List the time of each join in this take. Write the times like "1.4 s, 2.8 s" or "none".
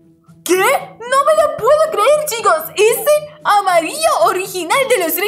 0.9 s